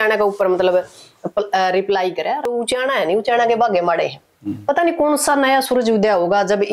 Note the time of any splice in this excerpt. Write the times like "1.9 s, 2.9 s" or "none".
2.5 s

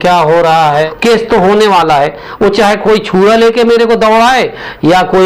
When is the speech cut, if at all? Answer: 0.9 s

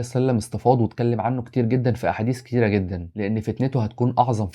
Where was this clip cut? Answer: none

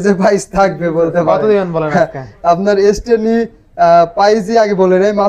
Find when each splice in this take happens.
none

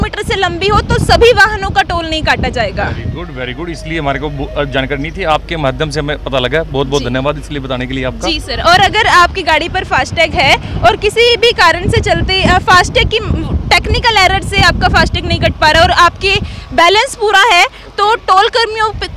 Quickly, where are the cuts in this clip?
none

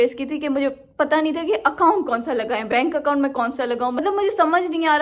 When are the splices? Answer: none

